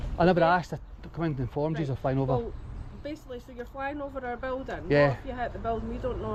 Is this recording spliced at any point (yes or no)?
no